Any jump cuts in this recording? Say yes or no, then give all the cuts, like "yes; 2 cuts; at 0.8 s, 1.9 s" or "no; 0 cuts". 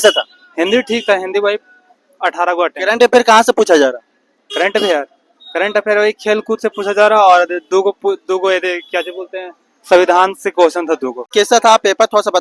yes; 1 cut; at 11.2 s